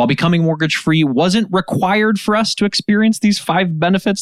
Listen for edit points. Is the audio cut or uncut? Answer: uncut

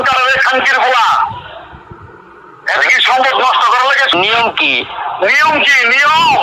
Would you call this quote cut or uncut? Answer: cut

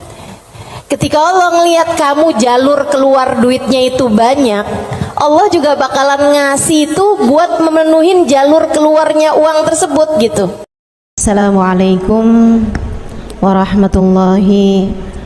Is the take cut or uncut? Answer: cut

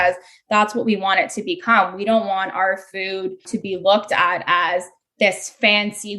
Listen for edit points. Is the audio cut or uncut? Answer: cut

